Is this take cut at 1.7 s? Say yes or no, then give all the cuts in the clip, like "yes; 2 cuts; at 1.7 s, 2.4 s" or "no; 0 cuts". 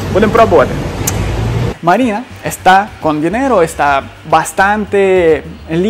yes; 1 cut; at 1.7 s